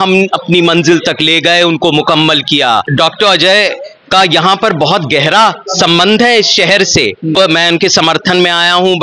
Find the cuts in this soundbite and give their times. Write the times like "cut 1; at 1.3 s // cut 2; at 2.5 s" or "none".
cut 1; at 2.9 s // cut 2; at 7.4 s